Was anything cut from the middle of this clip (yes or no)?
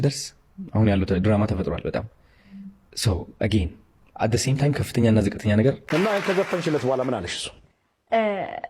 yes